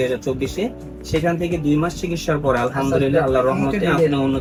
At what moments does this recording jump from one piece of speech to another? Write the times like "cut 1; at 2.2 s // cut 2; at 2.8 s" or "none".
none